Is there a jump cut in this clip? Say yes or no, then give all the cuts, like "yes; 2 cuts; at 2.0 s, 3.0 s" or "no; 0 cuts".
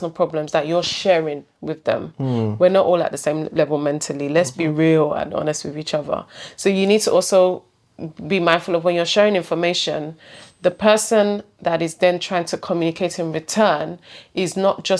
no; 0 cuts